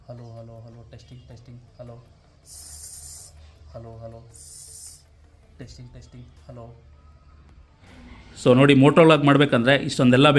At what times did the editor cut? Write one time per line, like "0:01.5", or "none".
0:07.9